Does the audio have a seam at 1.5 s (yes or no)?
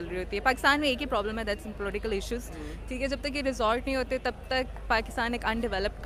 no